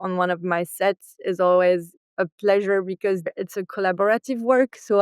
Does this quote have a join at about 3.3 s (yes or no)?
yes